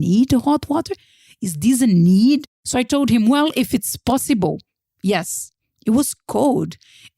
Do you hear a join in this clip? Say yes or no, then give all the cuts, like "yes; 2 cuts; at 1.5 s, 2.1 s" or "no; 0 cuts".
yes; 1 cut; at 2.6 s